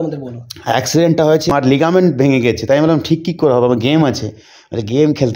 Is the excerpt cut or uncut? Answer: cut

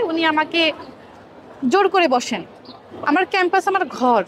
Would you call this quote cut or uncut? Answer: cut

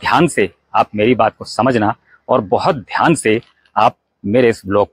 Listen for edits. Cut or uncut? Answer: uncut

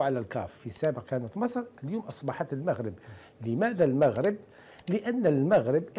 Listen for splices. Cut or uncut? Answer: uncut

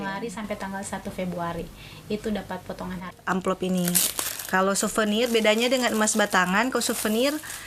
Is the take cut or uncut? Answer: cut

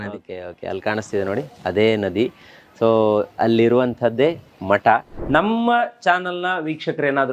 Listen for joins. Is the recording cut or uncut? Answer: cut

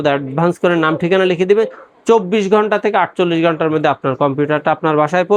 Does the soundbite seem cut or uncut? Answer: uncut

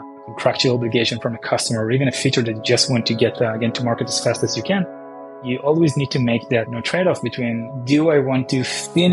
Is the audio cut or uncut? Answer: uncut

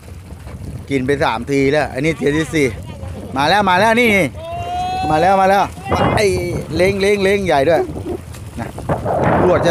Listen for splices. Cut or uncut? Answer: uncut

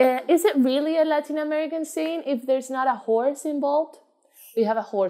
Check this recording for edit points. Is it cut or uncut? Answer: uncut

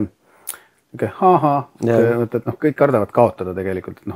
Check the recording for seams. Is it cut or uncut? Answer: uncut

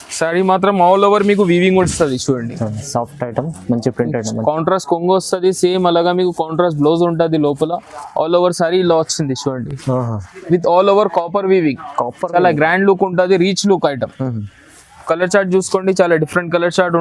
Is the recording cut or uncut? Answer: uncut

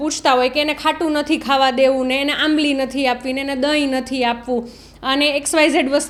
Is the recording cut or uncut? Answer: uncut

